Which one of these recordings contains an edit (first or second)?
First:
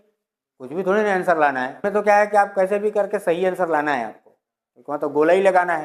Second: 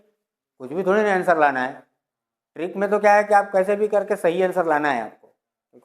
first